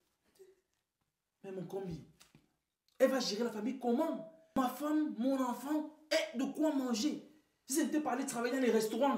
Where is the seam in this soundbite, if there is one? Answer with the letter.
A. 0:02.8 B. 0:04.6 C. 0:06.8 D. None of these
B